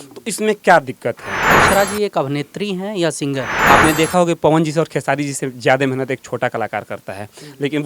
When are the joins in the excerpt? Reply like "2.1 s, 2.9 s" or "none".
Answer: 1.5 s, 3.5 s